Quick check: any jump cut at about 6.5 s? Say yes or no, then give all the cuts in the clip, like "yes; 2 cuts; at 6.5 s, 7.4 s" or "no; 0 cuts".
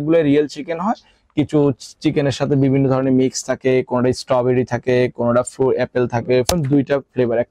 yes; 1 cut; at 6.5 s